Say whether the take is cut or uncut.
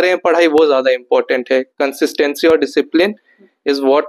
uncut